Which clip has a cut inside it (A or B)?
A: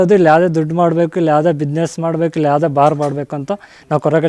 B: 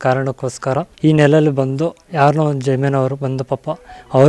B